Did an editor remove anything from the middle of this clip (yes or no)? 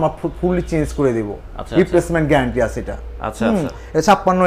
no